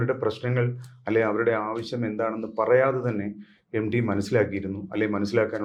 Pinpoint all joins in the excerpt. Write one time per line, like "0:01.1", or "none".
none